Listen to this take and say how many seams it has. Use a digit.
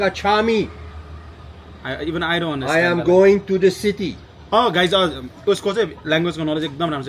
0